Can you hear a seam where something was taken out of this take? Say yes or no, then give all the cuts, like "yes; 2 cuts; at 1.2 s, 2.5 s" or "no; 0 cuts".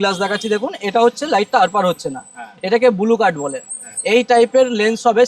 no; 0 cuts